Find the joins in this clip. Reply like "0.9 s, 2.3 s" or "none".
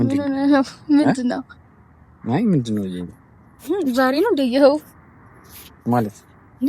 none